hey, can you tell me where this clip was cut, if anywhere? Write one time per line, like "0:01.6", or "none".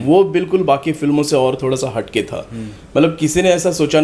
none